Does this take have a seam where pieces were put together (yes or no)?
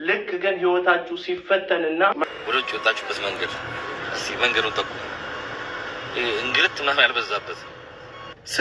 yes